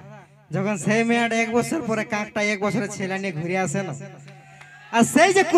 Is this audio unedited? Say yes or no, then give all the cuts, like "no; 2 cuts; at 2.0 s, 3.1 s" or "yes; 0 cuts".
yes; 0 cuts